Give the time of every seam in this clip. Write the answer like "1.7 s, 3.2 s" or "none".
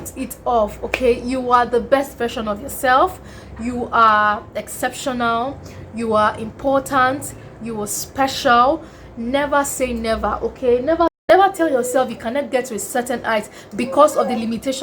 11.2 s